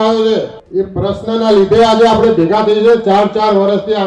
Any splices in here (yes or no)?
no